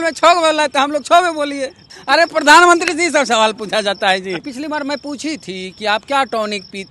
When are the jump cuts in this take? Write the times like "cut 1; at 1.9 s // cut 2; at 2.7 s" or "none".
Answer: cut 1; at 1.9 s // cut 2; at 4.5 s